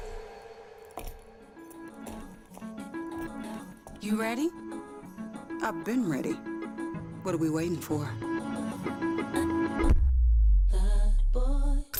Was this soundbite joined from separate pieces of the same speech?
no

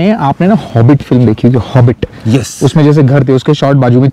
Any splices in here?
no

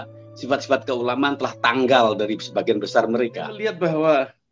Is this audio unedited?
no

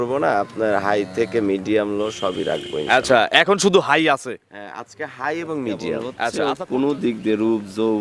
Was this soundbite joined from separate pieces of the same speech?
yes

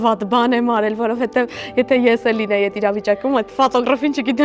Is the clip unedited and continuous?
yes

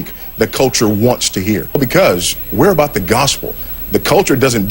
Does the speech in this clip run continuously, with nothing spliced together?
no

